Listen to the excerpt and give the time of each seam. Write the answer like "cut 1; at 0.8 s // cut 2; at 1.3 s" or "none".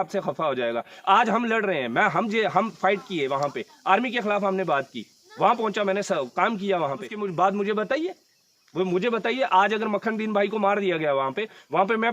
cut 1; at 7.1 s